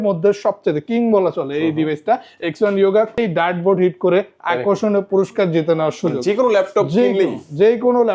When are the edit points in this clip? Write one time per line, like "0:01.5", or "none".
0:03.2